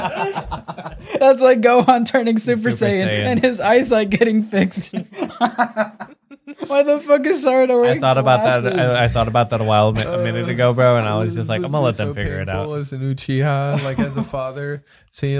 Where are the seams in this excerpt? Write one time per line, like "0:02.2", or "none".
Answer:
none